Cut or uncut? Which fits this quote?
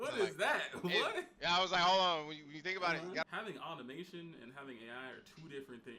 cut